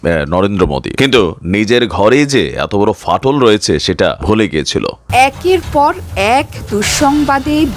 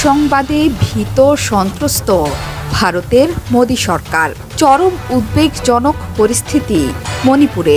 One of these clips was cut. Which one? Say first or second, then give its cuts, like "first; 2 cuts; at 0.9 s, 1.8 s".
first; 3 cuts; at 0.9 s, 4.2 s, 5.0 s